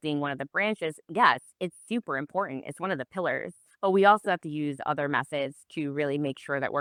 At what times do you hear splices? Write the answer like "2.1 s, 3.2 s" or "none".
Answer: none